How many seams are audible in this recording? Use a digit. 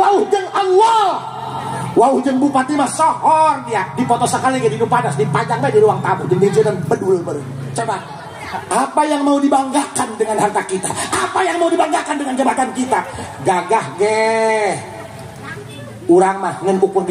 1